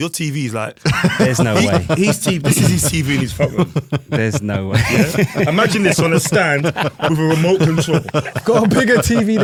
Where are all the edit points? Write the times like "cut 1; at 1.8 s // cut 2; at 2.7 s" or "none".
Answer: none